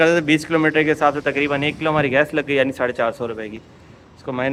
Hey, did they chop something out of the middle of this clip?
no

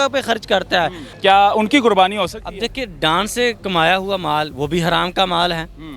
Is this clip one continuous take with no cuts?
no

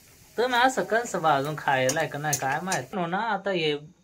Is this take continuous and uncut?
no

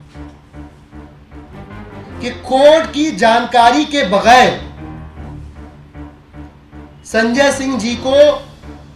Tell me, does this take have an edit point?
yes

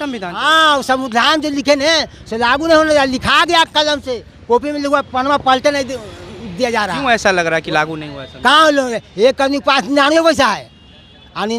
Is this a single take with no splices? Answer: yes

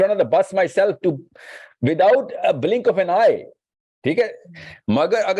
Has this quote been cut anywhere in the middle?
no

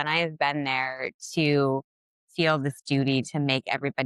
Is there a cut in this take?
no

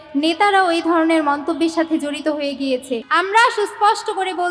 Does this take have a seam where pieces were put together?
yes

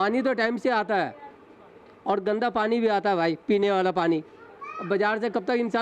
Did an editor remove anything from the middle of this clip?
no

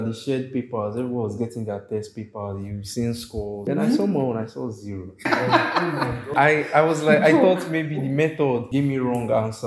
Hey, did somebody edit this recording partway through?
yes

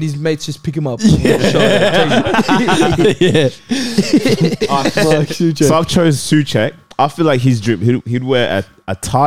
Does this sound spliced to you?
no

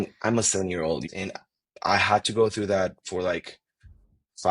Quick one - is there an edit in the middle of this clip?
yes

